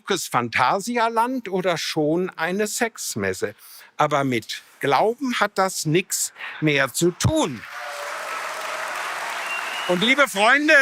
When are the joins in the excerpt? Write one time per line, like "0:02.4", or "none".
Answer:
none